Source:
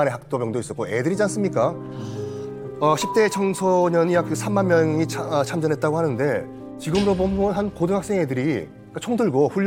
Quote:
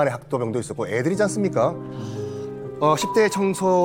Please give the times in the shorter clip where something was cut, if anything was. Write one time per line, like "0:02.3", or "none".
none